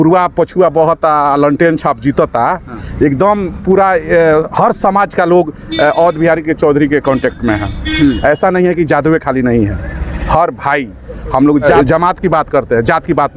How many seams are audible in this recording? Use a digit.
1